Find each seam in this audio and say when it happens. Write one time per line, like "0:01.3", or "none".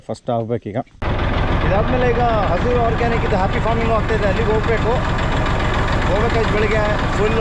0:01.0